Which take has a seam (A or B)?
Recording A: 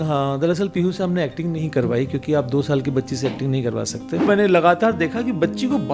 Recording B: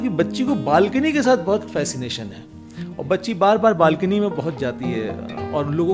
A